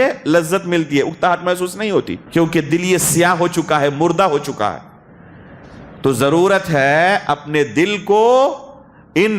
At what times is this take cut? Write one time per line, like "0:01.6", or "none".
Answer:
0:02.2